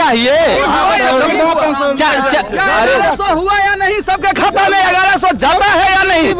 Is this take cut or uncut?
uncut